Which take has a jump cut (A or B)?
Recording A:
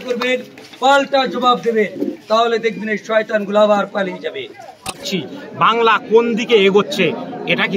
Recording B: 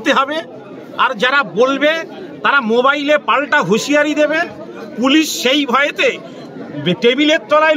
A